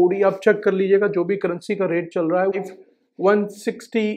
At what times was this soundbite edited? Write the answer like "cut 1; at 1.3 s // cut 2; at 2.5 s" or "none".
cut 1; at 2.6 s